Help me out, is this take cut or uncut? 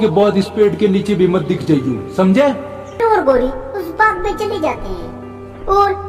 cut